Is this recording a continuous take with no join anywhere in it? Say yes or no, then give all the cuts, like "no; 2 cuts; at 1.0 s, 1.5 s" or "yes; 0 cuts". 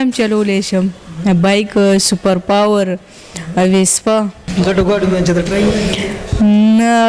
no; 1 cut; at 4.5 s